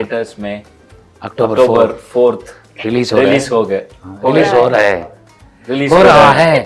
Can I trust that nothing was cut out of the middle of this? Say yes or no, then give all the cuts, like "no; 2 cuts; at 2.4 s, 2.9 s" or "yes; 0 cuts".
yes; 0 cuts